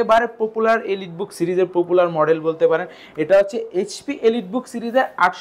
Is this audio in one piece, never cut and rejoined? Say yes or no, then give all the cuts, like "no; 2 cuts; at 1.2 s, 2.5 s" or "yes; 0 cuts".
yes; 0 cuts